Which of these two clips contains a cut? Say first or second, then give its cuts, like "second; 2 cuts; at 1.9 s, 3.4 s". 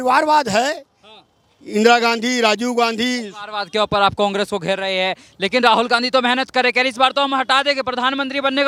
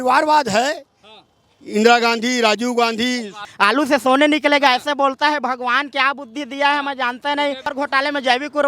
second; 2 cuts; at 3.4 s, 7.7 s